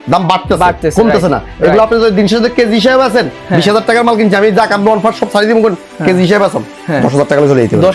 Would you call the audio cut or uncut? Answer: uncut